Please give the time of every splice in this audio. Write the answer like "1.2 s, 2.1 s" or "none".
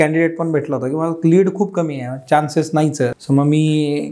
3.2 s

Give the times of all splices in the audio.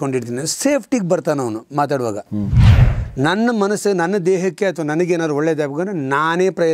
2.6 s

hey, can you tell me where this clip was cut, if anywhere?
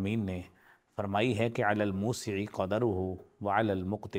none

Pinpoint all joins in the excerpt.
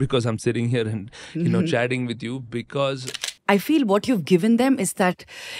3.3 s

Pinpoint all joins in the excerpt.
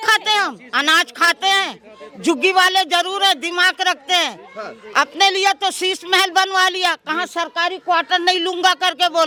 none

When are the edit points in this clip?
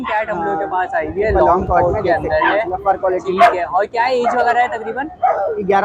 none

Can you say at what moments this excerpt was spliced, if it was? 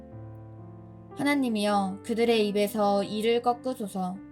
1.1 s

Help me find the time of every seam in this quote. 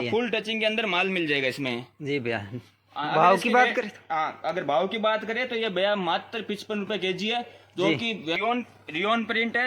8.4 s

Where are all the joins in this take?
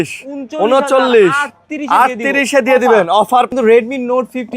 3.5 s

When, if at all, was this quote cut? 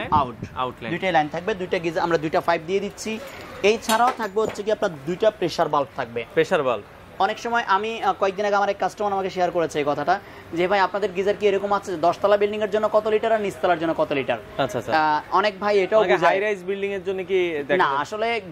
none

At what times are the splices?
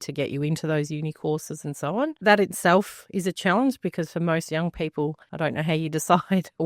2.2 s, 5.2 s

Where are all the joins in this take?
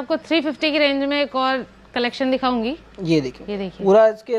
none

